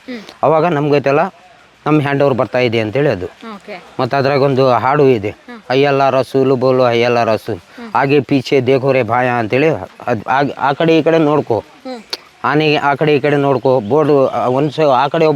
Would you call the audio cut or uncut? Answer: uncut